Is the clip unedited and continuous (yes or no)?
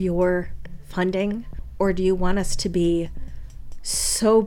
no